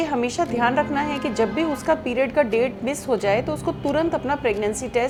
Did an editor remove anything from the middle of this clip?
no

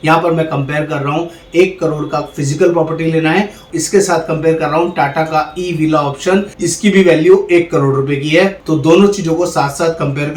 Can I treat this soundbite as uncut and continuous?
yes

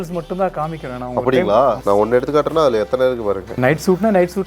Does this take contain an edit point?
yes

